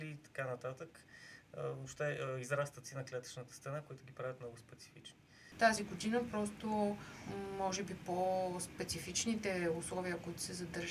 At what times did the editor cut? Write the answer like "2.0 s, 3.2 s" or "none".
5.4 s